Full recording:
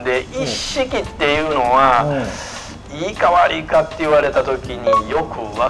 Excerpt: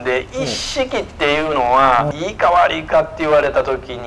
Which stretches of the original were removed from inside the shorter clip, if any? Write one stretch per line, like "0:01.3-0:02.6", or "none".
0:02.1-0:02.9